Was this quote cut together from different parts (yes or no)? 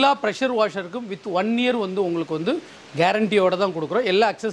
no